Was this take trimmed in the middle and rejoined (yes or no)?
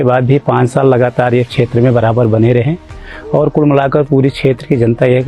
no